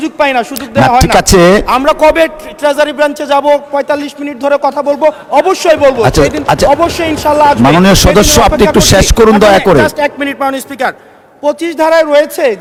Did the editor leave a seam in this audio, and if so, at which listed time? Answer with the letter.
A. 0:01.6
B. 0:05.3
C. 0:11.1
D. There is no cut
D